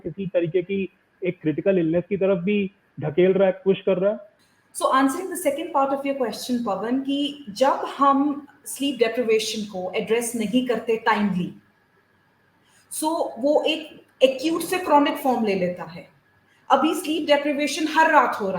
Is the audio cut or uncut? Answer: uncut